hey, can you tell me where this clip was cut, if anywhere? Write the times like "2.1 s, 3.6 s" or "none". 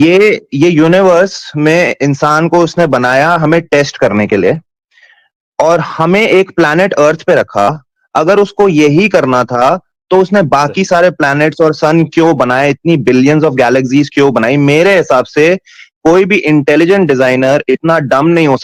none